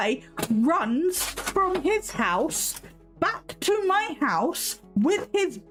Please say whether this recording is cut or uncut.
uncut